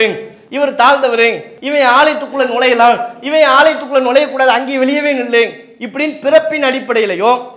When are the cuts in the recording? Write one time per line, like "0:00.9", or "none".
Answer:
0:01.5